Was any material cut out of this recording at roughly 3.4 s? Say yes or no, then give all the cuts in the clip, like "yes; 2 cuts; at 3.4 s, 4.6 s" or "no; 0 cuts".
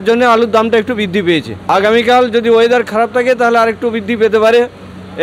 no; 1 cut; at 1.6 s